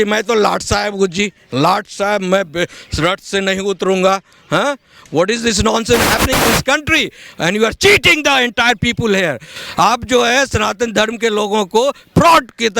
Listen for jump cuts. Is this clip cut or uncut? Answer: uncut